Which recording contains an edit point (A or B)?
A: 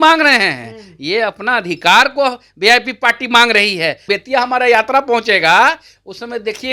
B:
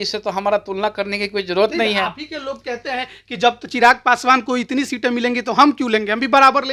A